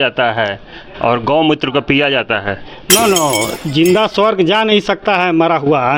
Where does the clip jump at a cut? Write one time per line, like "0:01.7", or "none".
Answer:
0:03.5